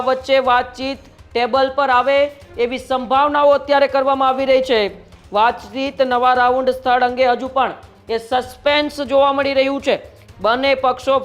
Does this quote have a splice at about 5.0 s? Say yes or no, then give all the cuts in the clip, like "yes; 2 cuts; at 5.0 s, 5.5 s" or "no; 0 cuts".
no; 0 cuts